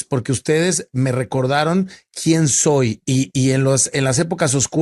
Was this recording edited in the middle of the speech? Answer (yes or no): no